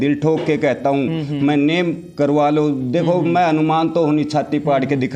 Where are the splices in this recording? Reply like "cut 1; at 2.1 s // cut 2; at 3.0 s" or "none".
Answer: none